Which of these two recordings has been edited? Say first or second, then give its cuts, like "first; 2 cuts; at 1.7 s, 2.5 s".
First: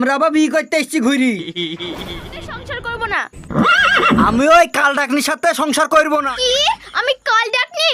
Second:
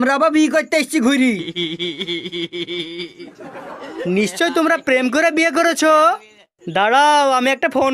first; 2 cuts; at 2.6 s, 6.3 s